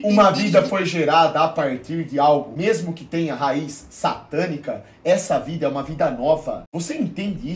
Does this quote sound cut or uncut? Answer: cut